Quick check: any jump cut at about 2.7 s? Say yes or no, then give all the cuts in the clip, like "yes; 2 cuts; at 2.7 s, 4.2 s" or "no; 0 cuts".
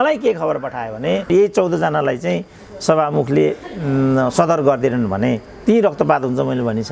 no; 1 cut; at 1.3 s